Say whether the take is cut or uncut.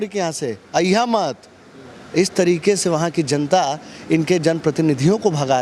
uncut